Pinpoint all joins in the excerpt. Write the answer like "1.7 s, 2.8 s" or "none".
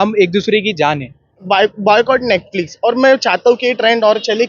1.4 s